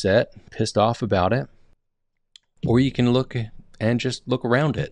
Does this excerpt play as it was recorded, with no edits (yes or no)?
yes